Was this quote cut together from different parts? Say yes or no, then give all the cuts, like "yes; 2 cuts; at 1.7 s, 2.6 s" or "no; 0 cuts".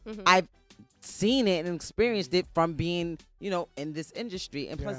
yes; 1 cut; at 2.8 s